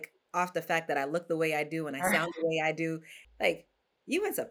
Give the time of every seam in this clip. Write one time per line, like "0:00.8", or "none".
0:03.1

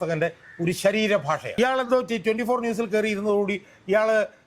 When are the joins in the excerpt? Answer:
0:01.5

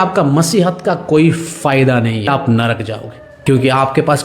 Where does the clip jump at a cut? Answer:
0:02.3
0:03.3

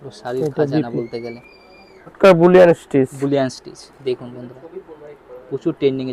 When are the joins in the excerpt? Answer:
0:02.2

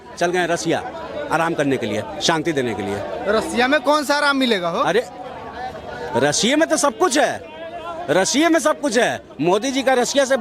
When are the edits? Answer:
none

